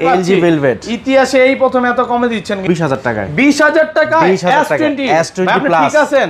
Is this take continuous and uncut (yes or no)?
no